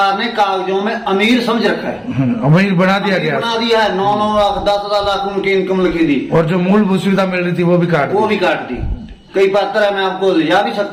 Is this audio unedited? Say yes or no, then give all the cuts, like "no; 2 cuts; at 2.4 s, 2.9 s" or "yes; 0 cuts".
yes; 0 cuts